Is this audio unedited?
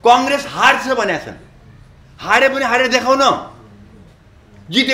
yes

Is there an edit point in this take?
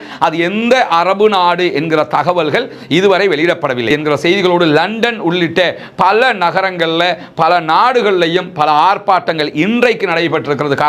yes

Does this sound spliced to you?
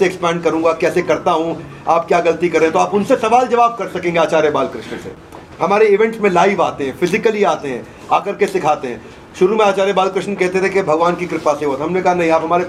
no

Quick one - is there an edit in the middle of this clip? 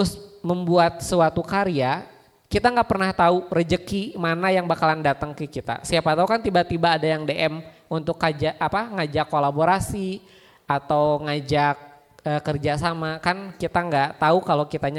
no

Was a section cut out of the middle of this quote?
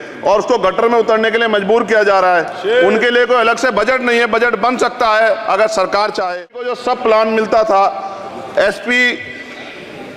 yes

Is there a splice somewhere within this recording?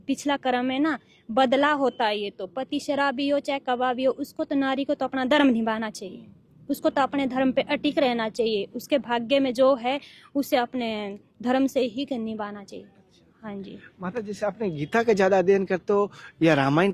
no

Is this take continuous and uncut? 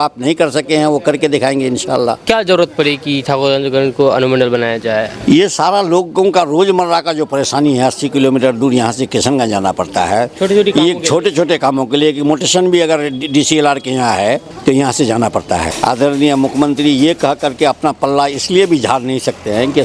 no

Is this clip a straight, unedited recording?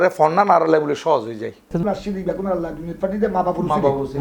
no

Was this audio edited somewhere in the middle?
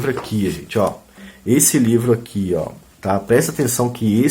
yes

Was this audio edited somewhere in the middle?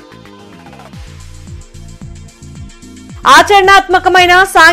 no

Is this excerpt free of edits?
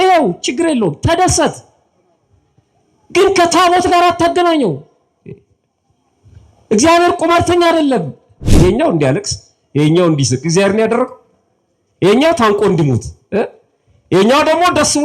no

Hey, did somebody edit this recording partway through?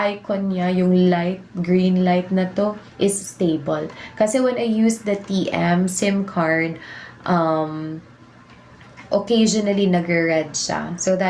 no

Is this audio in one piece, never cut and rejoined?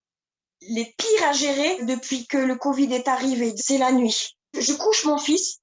yes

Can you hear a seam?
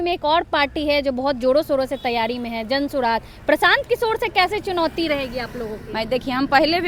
no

